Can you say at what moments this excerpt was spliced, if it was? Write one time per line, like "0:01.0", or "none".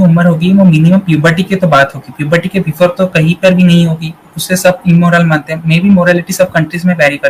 none